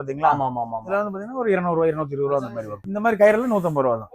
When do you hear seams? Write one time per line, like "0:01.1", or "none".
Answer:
0:02.8